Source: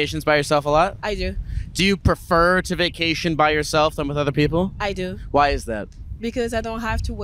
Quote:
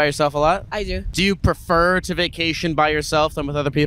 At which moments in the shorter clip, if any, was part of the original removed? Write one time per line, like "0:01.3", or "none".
0:01.0